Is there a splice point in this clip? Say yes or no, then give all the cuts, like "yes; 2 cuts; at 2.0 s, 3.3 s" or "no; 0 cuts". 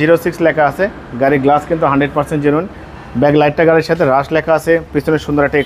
no; 0 cuts